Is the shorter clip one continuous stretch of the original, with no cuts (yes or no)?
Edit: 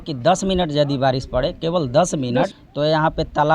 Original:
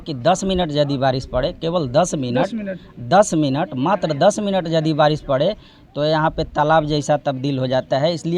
no